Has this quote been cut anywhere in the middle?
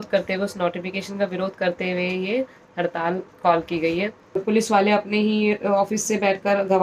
yes; 1 cut; at 4.4 s

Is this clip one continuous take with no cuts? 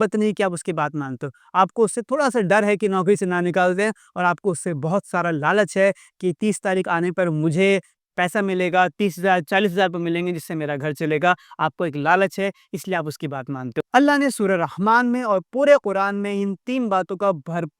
no; 1 cut; at 13.7 s

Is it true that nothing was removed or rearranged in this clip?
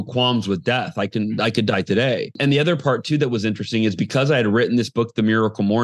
no; 1 cut; at 2.4 s

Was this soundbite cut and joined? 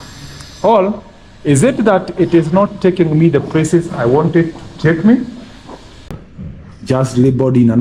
yes; 1 cut; at 6.1 s

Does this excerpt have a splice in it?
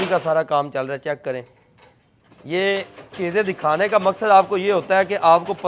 no; 0 cuts

